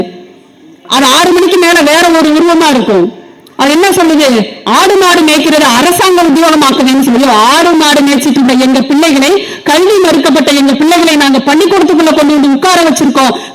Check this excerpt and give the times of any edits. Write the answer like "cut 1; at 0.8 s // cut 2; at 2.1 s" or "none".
none